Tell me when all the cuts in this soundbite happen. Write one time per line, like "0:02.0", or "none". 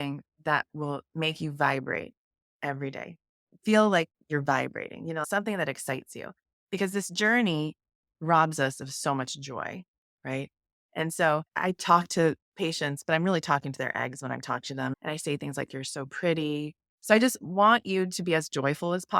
0:05.3
0:11.5